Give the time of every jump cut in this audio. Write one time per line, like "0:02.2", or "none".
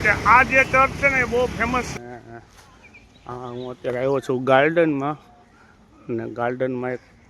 0:01.9